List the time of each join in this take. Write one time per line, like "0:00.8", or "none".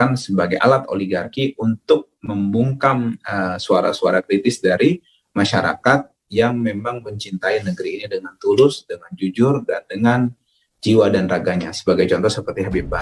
none